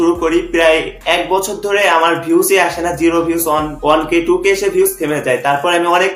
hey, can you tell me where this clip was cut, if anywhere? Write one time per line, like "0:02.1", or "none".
0:03.7

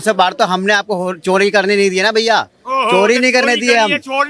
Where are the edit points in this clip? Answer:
none

